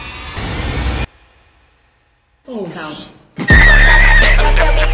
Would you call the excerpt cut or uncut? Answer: cut